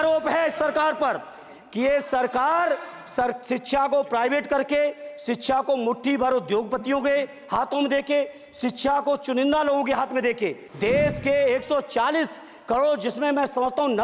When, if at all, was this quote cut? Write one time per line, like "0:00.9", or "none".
0:10.7